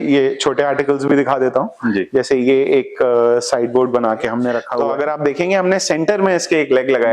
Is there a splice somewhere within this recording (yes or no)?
yes